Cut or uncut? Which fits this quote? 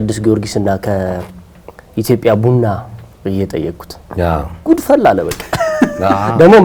uncut